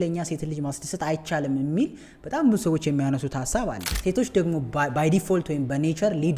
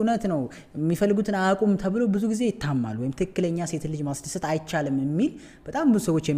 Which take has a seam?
first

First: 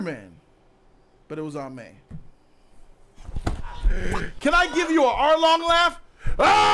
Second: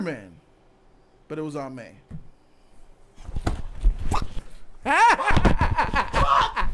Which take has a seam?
first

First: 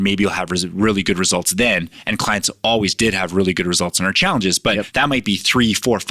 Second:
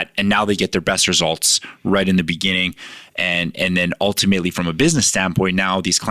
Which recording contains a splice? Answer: first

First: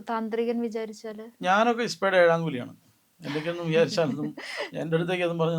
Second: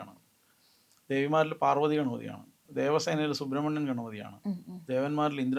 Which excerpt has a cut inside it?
second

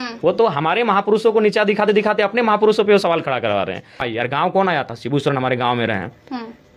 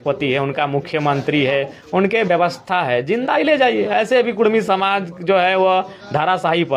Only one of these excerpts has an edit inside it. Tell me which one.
first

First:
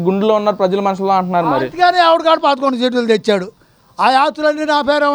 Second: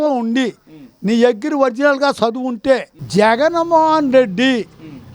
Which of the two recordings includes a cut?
second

